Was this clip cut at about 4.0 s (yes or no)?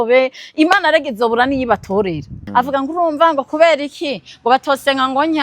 no